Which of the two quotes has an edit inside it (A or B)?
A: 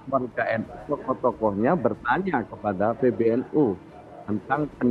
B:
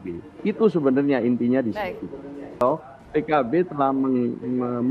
B